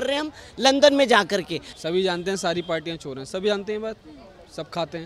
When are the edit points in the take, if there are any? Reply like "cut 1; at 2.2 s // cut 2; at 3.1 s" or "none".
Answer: cut 1; at 1.7 s